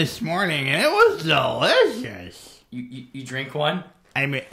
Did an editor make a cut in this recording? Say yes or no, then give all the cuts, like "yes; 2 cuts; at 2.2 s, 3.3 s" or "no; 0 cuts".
no; 0 cuts